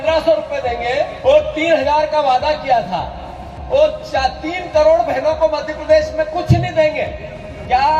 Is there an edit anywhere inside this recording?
yes; 1 cut; at 1.1 s

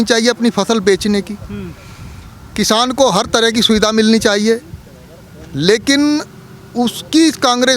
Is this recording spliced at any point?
no; 0 cuts

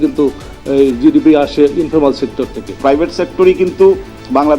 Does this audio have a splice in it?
yes; 1 cut; at 2.7 s

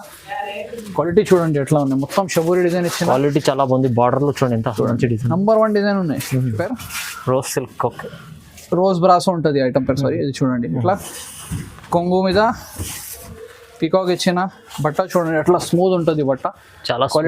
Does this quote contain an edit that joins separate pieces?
yes; 1 cut; at 6.5 s

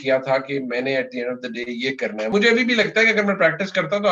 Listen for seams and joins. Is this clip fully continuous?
no; 1 cut; at 2.3 s

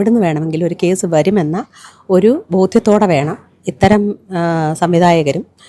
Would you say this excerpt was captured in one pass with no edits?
yes; 0 cuts

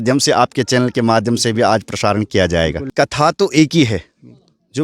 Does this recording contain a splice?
yes; 1 cut; at 2.9 s

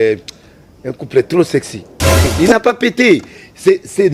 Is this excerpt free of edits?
no; 1 cut; at 2.3 s

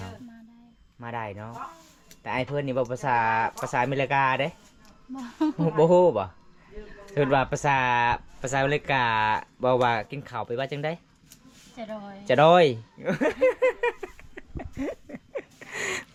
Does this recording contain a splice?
no; 0 cuts

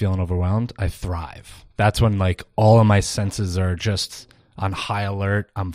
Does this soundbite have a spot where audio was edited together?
no; 0 cuts

